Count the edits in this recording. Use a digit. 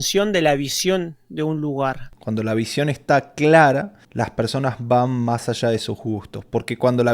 2